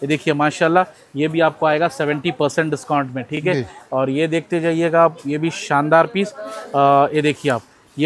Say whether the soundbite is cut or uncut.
uncut